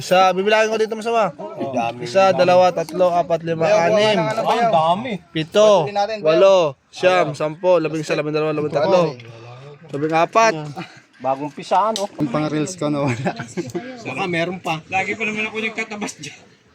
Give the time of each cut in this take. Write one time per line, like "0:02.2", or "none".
0:12.2